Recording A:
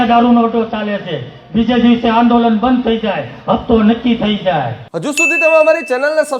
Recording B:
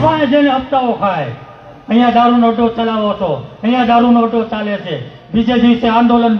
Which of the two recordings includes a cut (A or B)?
A